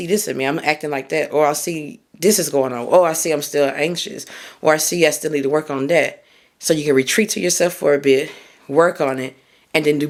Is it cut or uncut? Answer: uncut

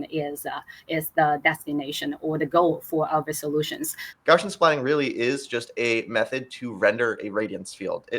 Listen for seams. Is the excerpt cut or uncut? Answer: cut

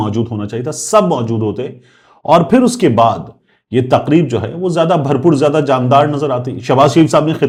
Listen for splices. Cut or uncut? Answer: uncut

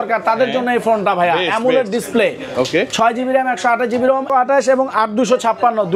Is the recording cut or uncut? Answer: cut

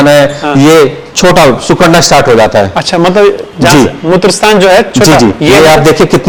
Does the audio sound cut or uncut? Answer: uncut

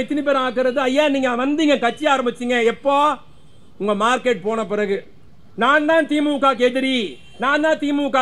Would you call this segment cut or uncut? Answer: uncut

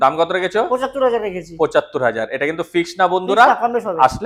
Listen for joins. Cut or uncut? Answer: uncut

